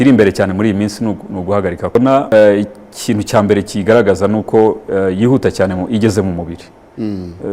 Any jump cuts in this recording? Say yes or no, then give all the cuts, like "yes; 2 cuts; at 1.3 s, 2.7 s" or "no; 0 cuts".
yes; 1 cut; at 1.9 s